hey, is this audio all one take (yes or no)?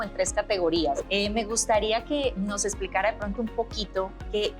no